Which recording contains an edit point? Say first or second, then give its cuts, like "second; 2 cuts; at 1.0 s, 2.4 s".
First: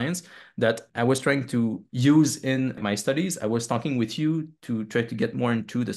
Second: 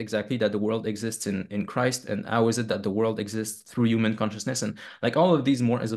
first; 3 cuts; at 0.9 s, 1.9 s, 2.8 s